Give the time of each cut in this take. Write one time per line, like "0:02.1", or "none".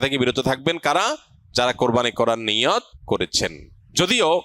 0:03.3